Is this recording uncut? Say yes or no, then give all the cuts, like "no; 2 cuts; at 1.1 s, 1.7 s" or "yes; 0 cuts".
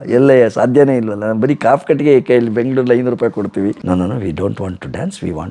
no; 1 cut; at 3.8 s